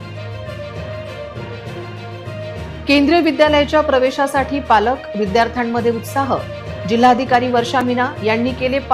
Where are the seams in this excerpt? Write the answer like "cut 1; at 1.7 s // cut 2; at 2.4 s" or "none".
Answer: cut 1; at 1.1 s // cut 2; at 1.7 s